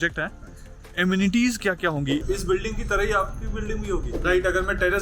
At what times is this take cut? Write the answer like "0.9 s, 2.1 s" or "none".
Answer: 2.2 s, 4.2 s